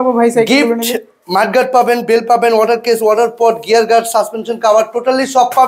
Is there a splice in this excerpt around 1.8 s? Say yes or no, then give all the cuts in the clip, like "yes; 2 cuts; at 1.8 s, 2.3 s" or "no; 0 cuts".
no; 0 cuts